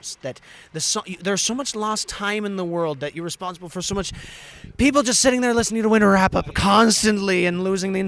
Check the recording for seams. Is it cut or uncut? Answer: uncut